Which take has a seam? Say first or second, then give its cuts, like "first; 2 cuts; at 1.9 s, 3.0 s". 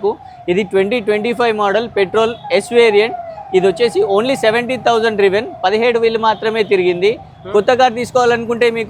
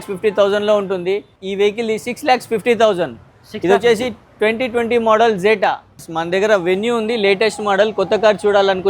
second; 2 cuts; at 1.4 s, 6.1 s